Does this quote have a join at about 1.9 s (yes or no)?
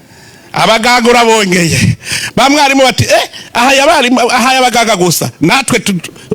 no